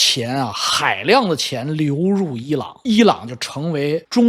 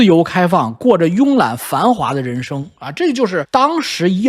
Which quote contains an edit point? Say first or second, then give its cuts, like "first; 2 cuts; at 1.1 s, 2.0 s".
first; 1 cut; at 2.7 s